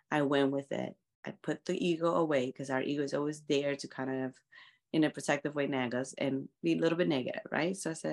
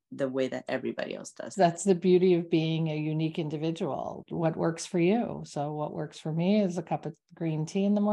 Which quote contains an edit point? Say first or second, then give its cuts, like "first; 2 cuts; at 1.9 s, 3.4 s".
second; 2 cuts; at 1.4 s, 4.2 s